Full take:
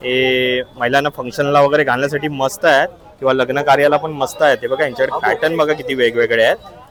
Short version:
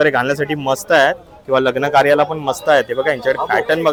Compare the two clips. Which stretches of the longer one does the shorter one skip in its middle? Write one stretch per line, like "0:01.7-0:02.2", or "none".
none

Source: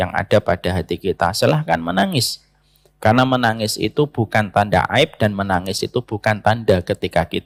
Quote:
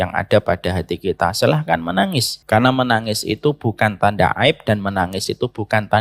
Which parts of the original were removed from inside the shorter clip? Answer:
0:02.3-0:02.8

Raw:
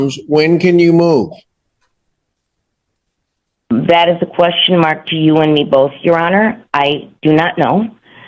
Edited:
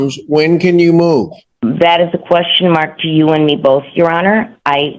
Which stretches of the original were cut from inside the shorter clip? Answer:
0:01.4-0:03.5

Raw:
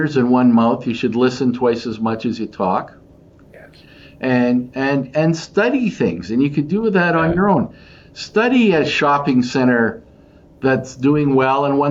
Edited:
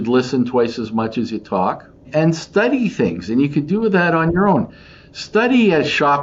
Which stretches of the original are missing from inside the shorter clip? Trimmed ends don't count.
0:03.1-0:05.1

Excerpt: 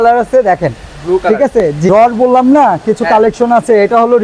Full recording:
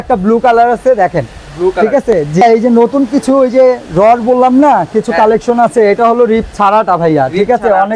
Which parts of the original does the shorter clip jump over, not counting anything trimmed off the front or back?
0:02.4-0:03.9

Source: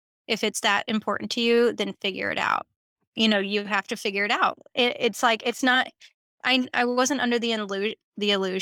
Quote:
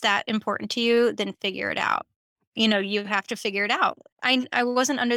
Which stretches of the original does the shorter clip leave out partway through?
0:04.6-0:06.2

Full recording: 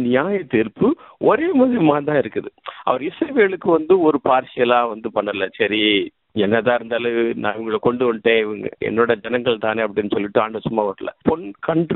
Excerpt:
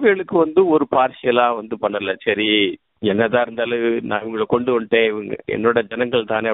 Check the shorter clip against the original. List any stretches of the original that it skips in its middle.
none

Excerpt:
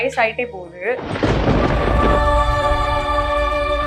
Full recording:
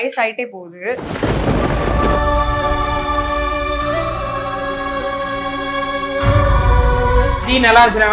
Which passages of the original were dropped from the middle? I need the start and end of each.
none

